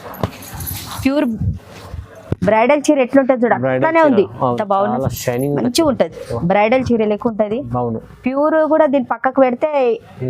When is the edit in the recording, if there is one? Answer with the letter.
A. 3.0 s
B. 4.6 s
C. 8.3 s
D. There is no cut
B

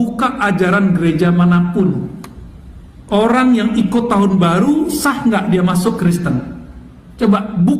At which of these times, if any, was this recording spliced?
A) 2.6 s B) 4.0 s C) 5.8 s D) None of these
D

